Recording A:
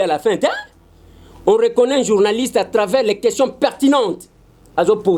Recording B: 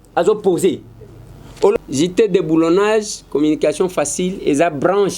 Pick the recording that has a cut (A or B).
B